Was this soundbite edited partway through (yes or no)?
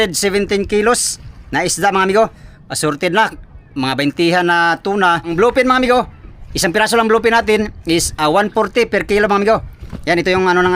yes